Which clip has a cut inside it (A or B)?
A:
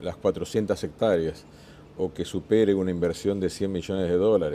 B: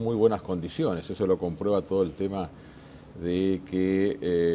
B